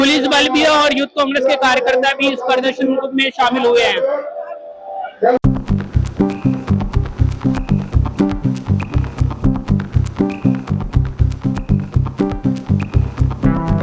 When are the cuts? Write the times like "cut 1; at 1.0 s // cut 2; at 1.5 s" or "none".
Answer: cut 1; at 5.4 s